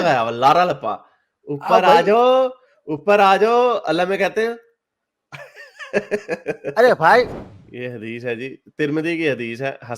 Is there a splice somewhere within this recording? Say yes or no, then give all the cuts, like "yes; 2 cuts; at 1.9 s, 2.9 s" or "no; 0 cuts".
yes; 1 cut; at 7.3 s